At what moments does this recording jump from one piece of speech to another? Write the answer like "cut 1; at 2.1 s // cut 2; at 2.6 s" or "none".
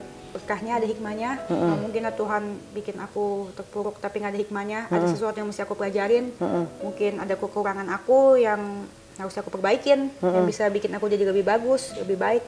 none